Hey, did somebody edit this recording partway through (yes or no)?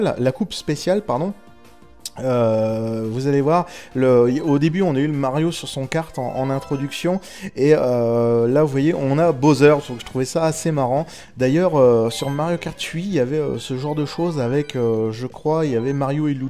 no